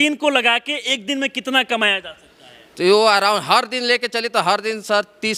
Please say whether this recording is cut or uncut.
uncut